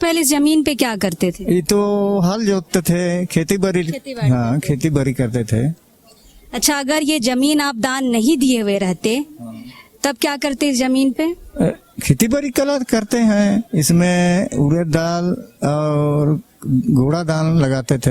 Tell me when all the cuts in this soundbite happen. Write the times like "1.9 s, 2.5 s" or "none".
none